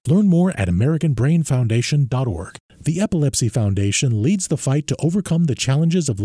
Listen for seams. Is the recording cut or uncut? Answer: cut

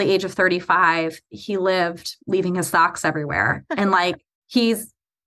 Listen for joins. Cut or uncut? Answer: cut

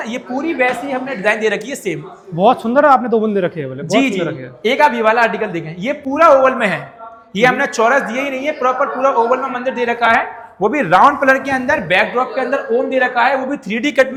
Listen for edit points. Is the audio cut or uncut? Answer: uncut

